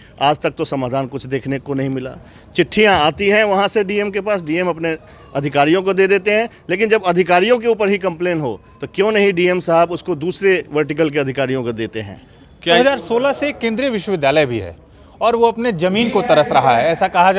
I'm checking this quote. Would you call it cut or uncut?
cut